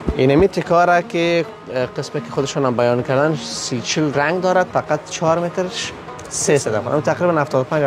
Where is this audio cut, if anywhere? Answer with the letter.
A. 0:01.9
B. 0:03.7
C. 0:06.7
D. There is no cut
D